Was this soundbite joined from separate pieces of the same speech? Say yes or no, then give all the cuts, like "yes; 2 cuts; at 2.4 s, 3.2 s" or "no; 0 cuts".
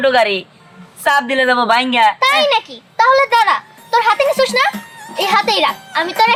no; 0 cuts